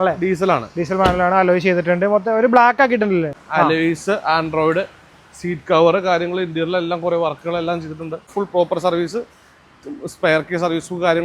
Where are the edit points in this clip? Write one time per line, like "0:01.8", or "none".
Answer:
0:03.3
0:08.3